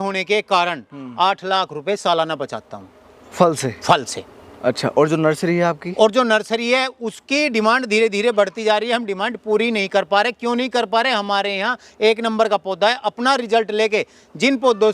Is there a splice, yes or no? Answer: no